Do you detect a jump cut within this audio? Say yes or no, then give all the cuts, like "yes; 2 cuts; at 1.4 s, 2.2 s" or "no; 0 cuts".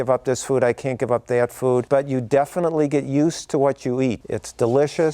yes; 2 cuts; at 1.9 s, 4.2 s